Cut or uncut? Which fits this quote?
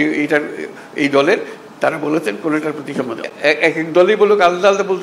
cut